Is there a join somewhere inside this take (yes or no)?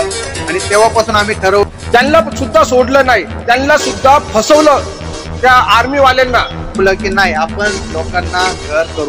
yes